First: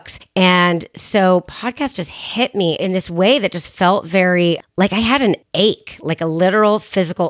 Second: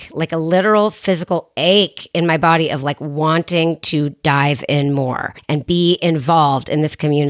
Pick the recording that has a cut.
first; 1 cut; at 2.8 s

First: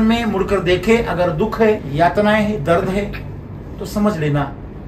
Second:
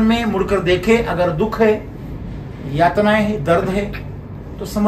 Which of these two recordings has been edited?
first; 1 cut; at 1.9 s

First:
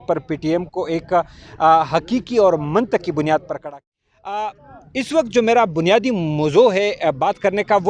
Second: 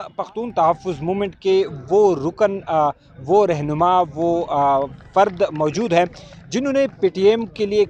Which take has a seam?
first; 1 cut; at 3.6 s

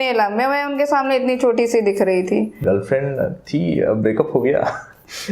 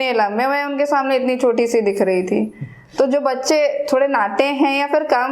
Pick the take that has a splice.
first; 1 cut; at 2.6 s

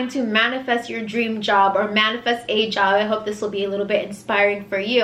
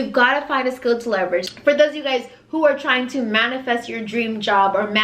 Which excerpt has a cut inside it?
second; 1 cut; at 1.5 s

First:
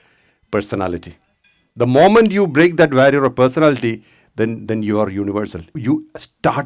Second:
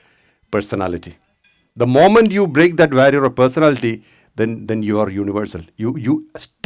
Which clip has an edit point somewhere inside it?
first; 1 cut; at 5.8 s

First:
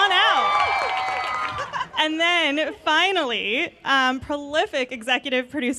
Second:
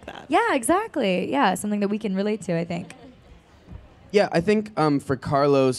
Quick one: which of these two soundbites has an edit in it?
second; 1 cut; at 1.9 s

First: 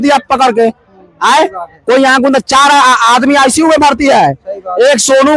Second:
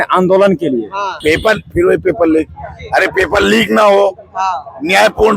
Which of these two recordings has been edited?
second; 1 cut; at 1.2 s

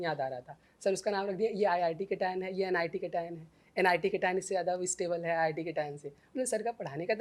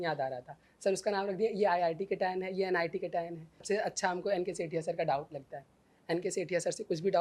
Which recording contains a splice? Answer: second; 1 cut; at 3.6 s

